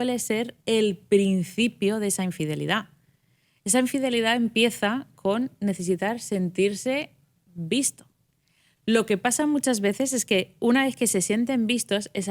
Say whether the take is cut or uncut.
uncut